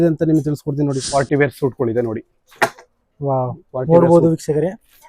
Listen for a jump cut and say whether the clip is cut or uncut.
cut